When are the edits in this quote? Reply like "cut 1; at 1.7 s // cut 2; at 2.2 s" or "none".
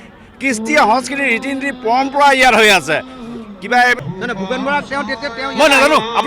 cut 1; at 4.0 s